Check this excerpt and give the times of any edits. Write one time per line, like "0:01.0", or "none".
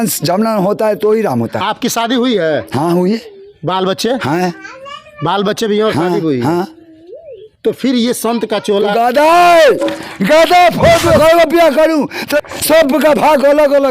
0:11.2
0:12.4